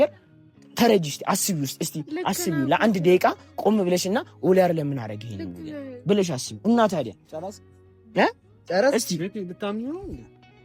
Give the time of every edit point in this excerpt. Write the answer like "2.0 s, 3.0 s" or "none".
none